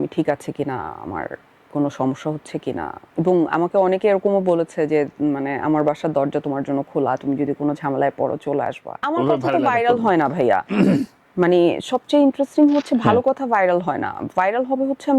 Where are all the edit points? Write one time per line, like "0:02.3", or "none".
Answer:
0:09.0